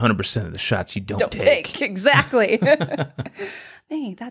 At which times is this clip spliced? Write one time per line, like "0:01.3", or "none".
none